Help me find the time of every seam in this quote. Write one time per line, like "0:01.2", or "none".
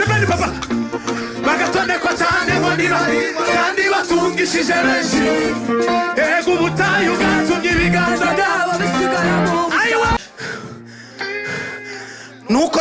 0:10.2